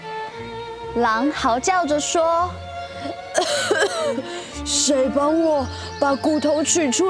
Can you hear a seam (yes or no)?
yes